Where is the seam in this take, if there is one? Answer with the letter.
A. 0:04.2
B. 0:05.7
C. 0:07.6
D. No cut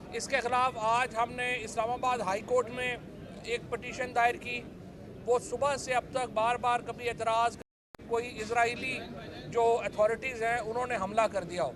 C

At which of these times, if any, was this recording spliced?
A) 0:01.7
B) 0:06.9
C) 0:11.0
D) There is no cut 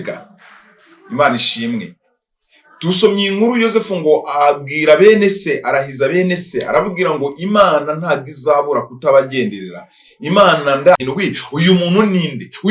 C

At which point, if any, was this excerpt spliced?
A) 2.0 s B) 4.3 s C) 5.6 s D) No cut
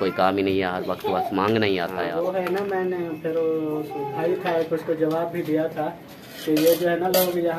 A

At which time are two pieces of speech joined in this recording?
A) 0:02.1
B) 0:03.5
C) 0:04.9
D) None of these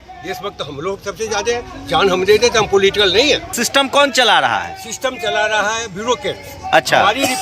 B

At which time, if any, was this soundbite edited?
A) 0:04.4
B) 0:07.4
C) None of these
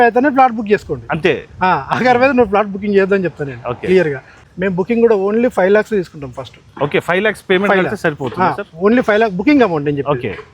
A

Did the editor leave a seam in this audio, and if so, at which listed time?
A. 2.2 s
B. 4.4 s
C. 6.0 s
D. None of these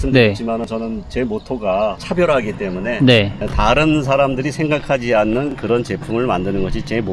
D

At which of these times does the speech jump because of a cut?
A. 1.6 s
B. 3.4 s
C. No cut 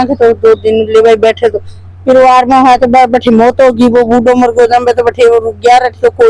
C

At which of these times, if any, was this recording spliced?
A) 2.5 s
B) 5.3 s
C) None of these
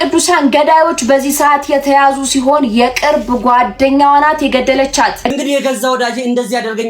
B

